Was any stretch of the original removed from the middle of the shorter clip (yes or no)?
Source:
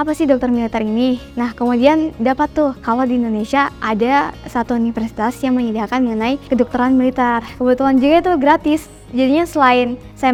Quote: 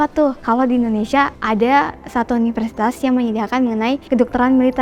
no